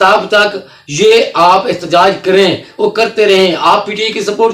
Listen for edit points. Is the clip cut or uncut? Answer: uncut